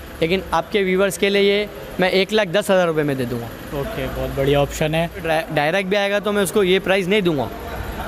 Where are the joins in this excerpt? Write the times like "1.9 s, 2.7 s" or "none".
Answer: none